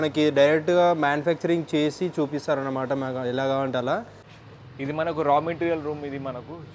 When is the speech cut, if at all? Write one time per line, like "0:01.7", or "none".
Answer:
0:04.2